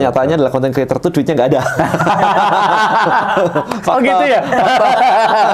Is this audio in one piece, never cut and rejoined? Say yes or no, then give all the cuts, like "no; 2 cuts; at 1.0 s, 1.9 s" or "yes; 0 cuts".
yes; 0 cuts